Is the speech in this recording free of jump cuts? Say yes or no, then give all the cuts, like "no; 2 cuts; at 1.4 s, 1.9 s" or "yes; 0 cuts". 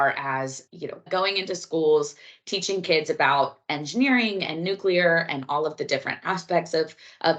no; 1 cut; at 1.0 s